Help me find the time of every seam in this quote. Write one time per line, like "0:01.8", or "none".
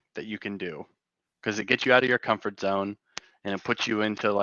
none